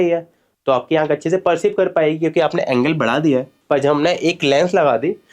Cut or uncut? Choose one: cut